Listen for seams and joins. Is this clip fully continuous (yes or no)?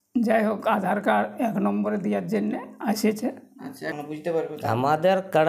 no